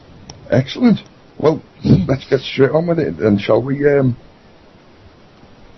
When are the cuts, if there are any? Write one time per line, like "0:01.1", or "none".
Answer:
0:04.3

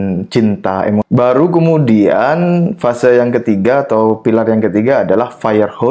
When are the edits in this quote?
0:01.1

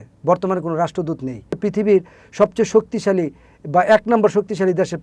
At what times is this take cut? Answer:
0:01.5

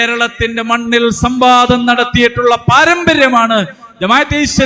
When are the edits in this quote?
none

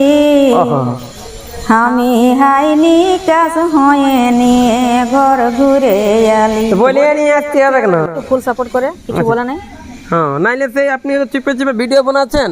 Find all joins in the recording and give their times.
0:08.2

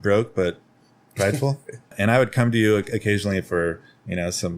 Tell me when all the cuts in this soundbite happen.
0:01.9

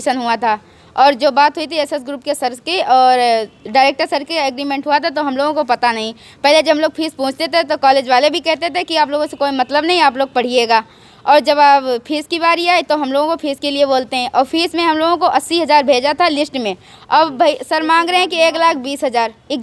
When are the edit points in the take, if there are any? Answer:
none

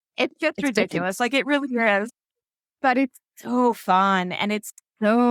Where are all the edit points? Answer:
none

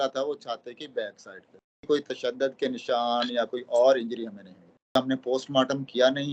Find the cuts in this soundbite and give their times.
0:01.8
0:05.0

